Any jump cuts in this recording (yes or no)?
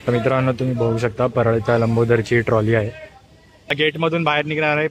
yes